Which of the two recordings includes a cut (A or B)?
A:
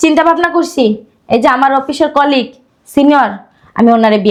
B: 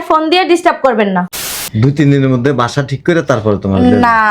B